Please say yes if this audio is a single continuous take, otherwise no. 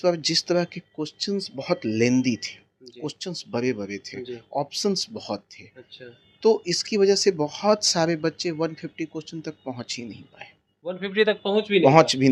yes